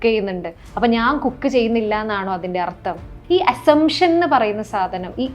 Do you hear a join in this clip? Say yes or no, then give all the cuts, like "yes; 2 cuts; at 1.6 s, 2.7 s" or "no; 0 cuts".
yes; 1 cut; at 3.1 s